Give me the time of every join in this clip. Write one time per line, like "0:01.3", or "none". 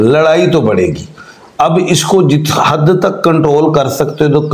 none